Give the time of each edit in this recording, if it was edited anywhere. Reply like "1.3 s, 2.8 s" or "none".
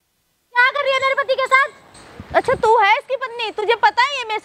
none